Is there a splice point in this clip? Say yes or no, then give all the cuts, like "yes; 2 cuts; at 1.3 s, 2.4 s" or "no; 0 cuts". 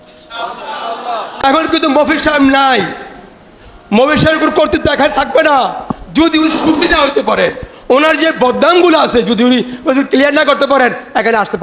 yes; 1 cut; at 1.3 s